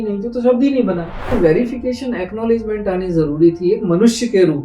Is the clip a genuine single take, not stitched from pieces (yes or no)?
no